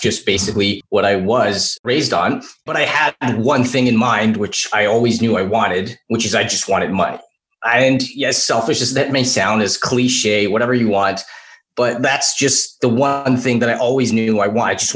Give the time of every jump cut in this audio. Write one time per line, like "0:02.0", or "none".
0:00.8
0:01.8